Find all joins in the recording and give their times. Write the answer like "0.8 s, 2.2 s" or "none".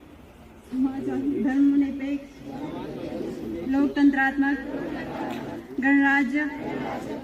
none